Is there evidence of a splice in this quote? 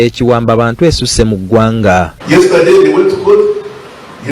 no; 0 cuts

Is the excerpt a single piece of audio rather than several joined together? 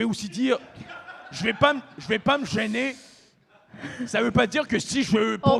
yes; 0 cuts

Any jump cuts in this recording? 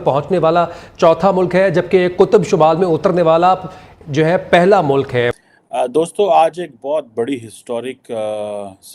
yes; 1 cut; at 5.4 s

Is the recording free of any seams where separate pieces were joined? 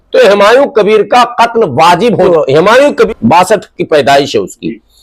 no; 2 cuts; at 2.3 s, 3.1 s

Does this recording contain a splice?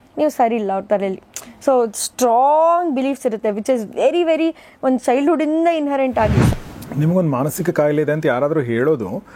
yes; 1 cut; at 6.4 s

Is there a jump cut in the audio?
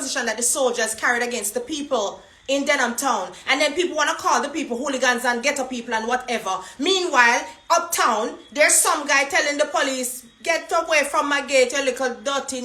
no; 0 cuts

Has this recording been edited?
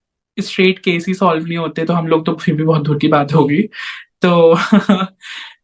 no; 0 cuts

